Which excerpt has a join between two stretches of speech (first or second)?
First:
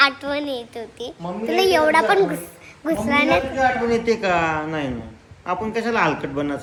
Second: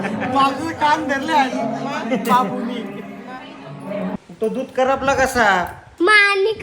second